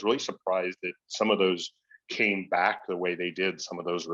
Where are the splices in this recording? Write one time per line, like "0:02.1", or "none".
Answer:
none

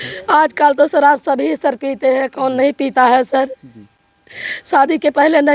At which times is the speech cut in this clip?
none

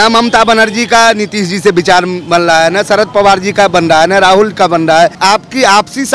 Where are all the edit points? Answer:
0:05.2

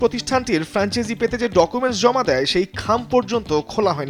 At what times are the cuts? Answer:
none

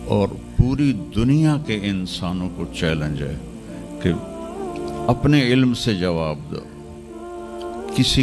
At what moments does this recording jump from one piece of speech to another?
none

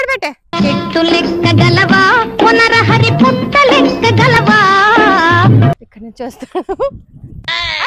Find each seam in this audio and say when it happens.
0:05.9

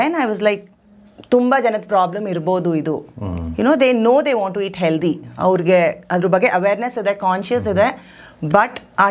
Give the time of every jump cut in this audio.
none

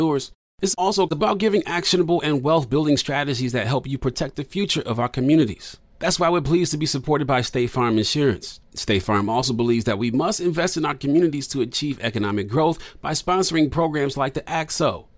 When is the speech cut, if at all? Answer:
none

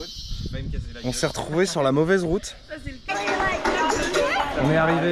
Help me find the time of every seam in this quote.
0:03.1

